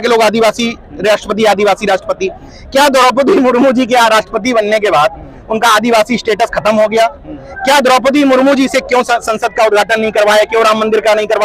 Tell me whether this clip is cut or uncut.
uncut